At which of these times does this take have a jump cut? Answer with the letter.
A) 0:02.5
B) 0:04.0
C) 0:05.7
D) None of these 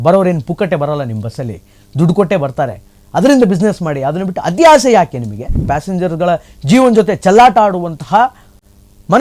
C